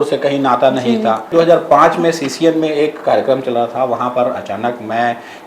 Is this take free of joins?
no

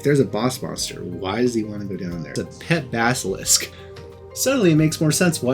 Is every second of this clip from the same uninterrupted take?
no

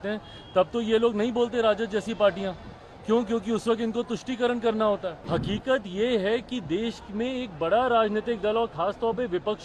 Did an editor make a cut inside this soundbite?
yes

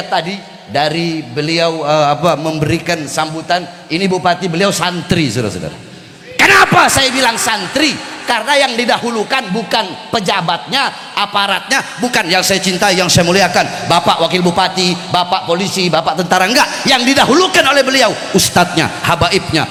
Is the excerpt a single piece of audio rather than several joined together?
yes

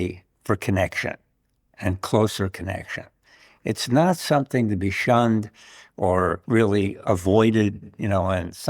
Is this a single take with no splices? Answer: no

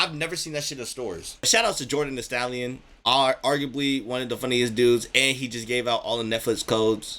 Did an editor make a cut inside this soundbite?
yes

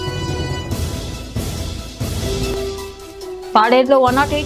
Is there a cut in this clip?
yes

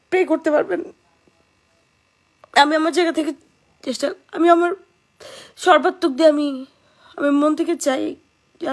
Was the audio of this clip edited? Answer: no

